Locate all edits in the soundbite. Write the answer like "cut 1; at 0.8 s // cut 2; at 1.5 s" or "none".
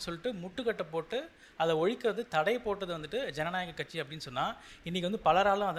none